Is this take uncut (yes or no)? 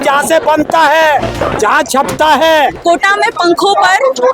no